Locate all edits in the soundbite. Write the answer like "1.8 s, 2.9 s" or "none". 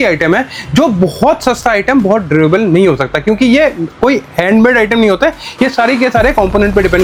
none